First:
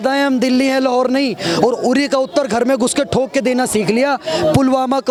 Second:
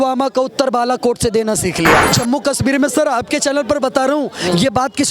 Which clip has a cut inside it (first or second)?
second